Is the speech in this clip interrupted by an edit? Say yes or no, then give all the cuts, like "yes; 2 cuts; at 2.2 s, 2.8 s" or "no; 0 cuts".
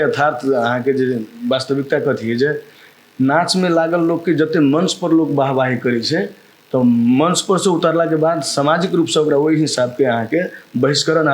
no; 0 cuts